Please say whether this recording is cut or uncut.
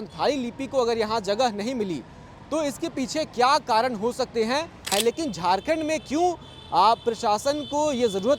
cut